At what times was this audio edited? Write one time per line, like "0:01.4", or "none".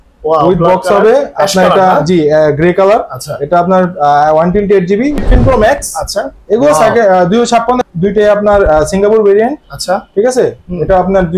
0:05.2
0:07.8